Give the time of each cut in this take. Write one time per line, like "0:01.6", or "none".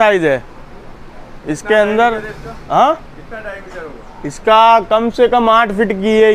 none